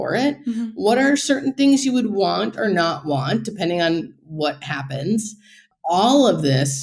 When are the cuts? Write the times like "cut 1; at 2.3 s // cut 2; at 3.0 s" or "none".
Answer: cut 1; at 5.6 s